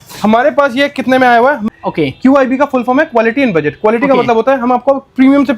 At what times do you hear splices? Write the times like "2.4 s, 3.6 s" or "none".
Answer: 1.6 s